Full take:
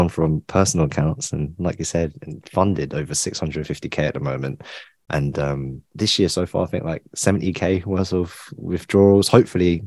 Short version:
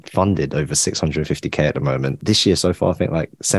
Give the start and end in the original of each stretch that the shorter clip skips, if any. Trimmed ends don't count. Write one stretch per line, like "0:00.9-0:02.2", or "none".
0:04.6-0:05.9